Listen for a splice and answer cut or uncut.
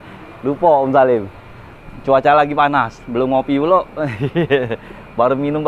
uncut